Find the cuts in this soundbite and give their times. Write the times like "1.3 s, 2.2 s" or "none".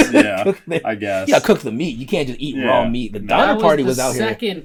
none